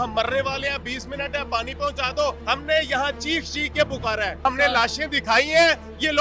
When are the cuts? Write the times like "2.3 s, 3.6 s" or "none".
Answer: 2.4 s, 4.5 s